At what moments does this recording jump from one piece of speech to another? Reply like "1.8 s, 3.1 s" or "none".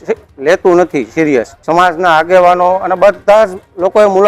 1.6 s